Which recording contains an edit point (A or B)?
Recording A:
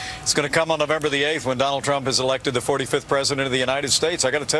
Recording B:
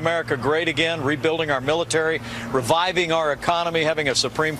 B